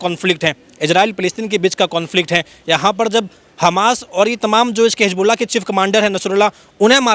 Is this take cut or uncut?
uncut